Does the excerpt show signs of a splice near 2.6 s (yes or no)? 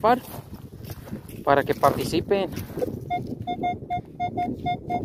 yes